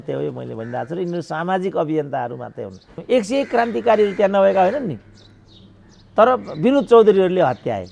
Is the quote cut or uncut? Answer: cut